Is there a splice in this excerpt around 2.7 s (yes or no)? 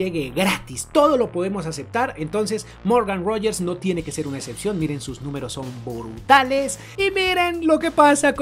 no